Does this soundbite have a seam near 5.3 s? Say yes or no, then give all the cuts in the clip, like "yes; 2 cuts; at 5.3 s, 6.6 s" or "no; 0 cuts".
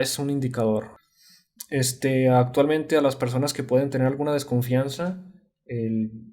no; 1 cut; at 1.0 s